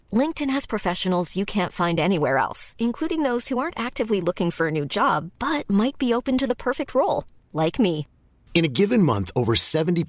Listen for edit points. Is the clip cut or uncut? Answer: uncut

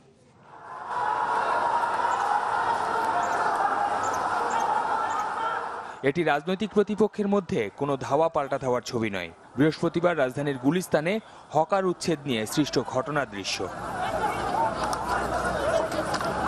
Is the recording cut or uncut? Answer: cut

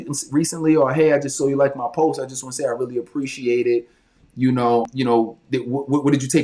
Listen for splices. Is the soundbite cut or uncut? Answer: cut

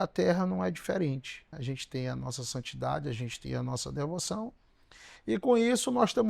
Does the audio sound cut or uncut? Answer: cut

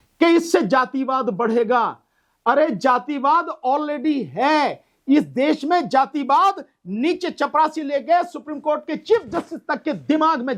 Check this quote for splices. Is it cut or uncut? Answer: uncut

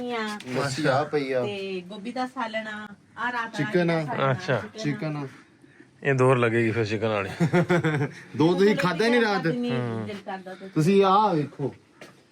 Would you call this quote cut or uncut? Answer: uncut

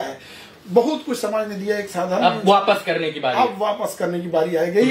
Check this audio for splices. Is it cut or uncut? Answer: uncut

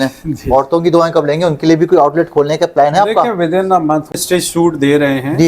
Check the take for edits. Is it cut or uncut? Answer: cut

